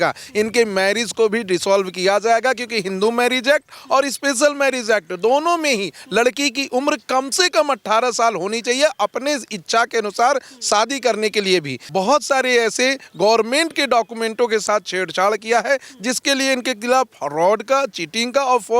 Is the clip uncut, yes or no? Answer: no